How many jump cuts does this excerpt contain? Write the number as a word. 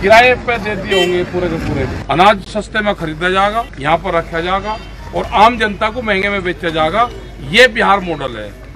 two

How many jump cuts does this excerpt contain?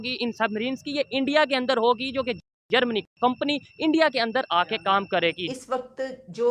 one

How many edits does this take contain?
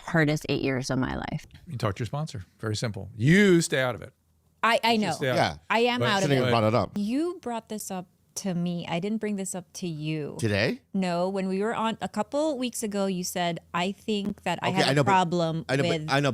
two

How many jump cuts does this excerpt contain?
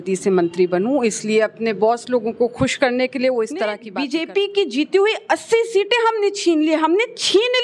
one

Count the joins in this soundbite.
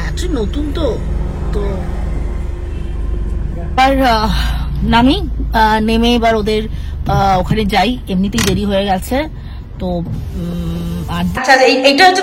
two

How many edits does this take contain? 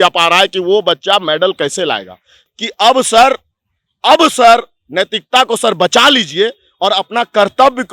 one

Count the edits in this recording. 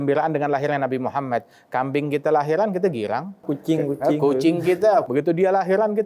one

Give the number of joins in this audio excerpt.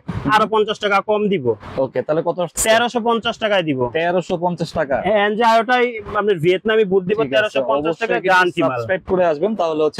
zero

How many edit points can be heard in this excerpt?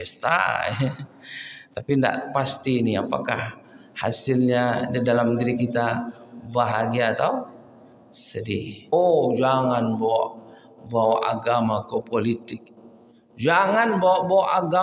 one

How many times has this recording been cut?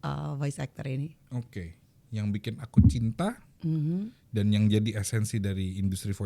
zero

